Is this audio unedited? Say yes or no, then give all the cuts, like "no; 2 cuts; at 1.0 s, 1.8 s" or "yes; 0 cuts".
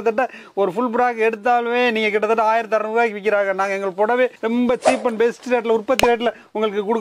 yes; 0 cuts